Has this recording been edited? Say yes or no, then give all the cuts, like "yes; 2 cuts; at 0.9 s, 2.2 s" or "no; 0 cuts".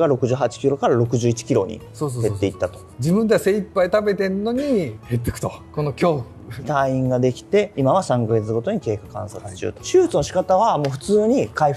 no; 0 cuts